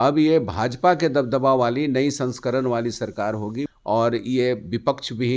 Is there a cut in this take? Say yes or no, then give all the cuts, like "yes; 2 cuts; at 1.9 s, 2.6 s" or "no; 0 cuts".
yes; 1 cut; at 3.7 s